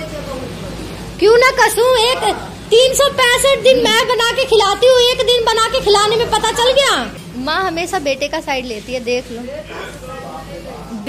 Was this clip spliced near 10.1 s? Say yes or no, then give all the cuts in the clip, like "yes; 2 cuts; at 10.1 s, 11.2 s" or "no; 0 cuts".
no; 0 cuts